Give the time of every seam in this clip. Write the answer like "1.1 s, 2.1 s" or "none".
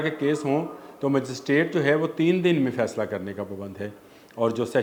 none